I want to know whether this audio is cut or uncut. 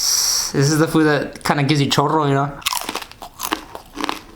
cut